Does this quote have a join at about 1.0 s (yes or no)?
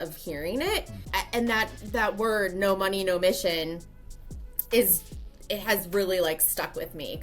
yes